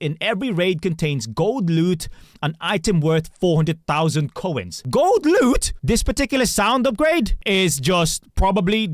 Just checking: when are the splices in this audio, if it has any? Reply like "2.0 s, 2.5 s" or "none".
5.7 s